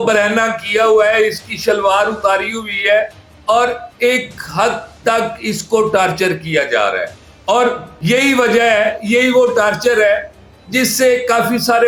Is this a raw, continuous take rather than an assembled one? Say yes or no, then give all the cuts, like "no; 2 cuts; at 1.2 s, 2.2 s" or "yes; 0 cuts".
yes; 0 cuts